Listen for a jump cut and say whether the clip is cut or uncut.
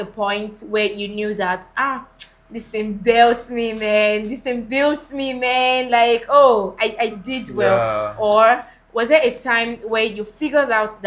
uncut